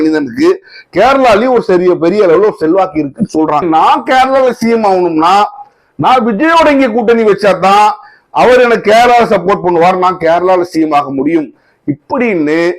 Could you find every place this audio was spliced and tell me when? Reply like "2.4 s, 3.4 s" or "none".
3.6 s